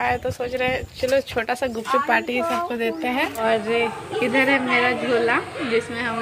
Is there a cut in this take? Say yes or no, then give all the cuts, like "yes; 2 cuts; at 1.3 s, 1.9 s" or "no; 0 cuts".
yes; 1 cut; at 3.4 s